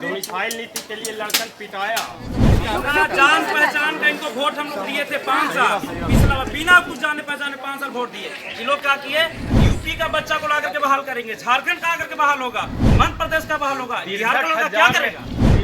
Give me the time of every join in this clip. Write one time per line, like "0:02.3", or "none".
0:02.4